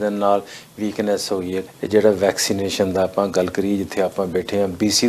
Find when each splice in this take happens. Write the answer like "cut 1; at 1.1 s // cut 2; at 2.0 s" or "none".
cut 1; at 1.7 s

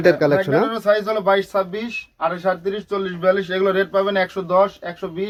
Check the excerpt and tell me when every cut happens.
none

